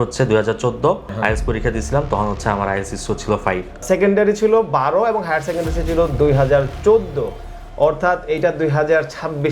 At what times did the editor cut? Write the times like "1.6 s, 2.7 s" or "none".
1.1 s, 3.8 s